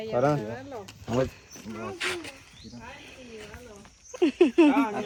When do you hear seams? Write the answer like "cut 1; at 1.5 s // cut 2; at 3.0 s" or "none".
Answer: none